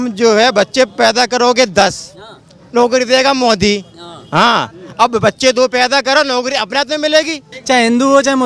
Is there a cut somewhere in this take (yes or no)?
yes